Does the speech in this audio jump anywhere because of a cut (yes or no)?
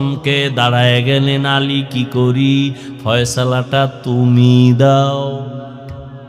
no